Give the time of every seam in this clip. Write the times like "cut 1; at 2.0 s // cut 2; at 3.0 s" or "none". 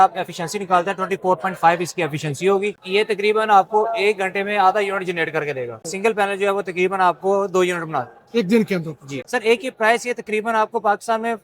cut 1; at 2.8 s // cut 2; at 5.8 s // cut 3; at 9.0 s

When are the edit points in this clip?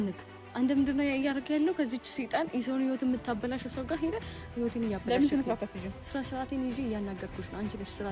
none

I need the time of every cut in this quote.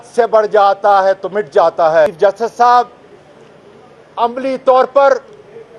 cut 1; at 2.1 s

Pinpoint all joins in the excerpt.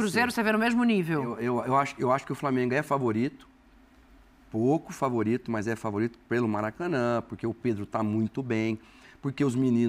none

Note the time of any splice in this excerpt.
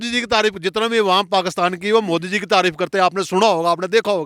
none

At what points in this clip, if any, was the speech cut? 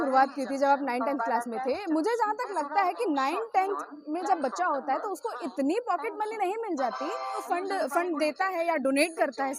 cut 1; at 7.4 s

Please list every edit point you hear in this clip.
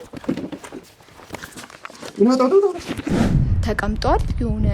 cut 1; at 3.3 s

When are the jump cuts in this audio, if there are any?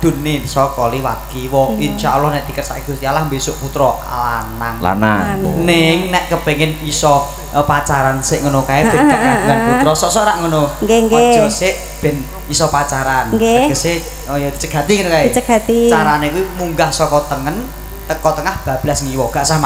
cut 1; at 5.4 s

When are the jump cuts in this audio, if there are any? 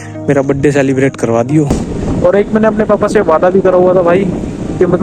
cut 1; at 1.9 s

